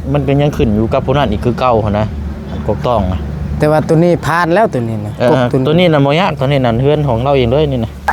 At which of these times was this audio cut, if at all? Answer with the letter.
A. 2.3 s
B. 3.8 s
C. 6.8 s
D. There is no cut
D